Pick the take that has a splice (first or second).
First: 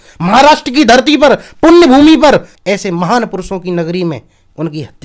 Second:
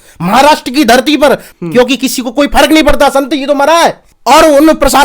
second